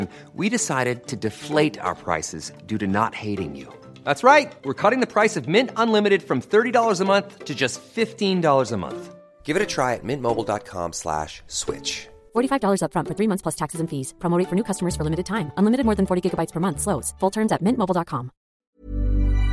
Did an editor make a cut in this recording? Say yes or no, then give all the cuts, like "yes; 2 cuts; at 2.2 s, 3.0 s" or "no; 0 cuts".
yes; 1 cut; at 18.5 s